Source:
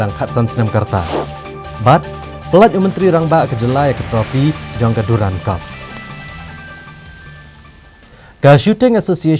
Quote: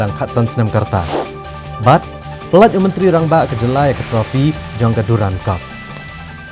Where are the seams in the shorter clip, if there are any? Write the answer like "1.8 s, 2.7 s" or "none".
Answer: 5.6 s

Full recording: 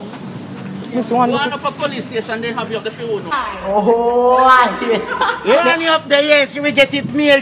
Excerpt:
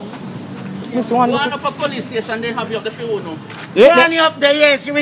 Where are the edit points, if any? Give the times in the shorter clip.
3.5 s

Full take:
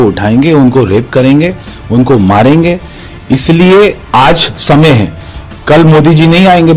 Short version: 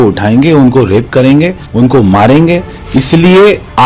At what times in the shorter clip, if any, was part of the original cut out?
1.6 s, 2.8 s

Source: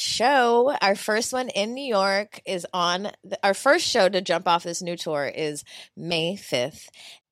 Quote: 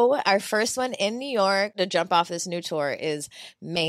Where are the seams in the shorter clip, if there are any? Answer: 1.8 s

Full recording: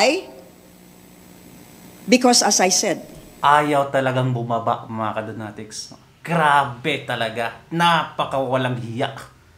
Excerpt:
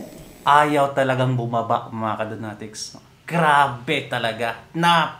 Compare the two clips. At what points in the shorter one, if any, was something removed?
none

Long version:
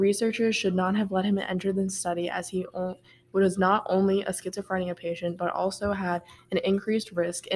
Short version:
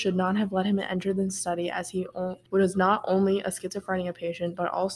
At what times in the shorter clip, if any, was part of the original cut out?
2.4 s

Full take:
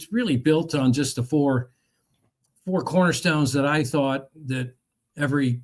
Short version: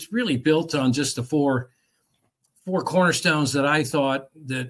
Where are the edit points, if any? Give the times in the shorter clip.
none

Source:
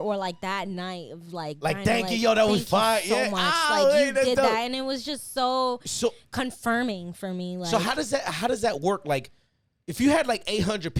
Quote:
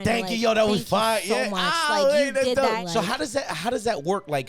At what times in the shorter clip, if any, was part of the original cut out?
2.8 s

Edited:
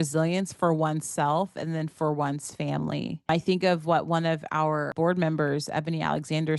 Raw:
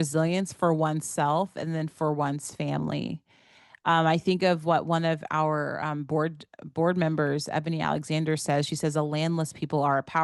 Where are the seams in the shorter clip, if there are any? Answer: 3.3 s, 4.9 s

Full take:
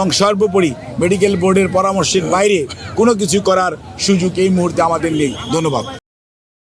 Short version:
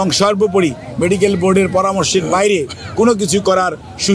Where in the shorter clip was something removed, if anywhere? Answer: none

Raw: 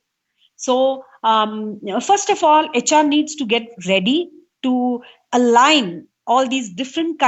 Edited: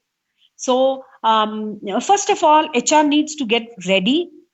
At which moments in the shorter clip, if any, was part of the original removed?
none

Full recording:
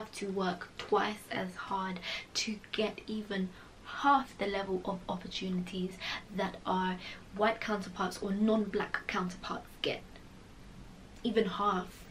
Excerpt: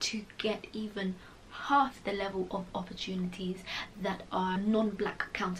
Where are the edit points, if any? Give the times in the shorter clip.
4.6 s

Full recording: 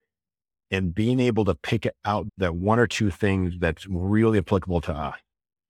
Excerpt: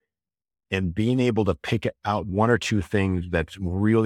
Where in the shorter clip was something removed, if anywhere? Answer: 2.3 s

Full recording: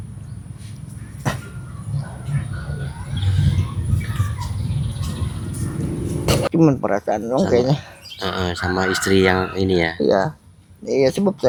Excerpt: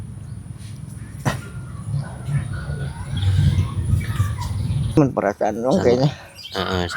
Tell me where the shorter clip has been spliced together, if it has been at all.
5.0 s

